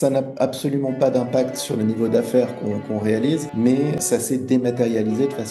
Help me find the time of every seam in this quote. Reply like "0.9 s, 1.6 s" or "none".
1.7 s, 3.9 s